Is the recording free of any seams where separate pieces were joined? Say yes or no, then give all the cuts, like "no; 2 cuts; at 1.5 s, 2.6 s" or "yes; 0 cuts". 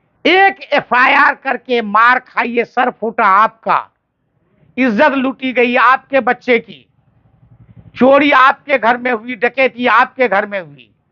yes; 0 cuts